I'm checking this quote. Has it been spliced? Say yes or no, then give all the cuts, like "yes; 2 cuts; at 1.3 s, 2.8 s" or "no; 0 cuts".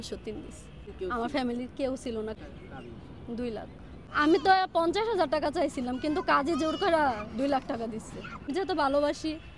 yes; 4 cuts; at 0.9 s, 2.3 s, 3.9 s, 8.5 s